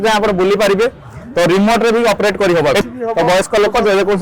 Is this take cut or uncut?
cut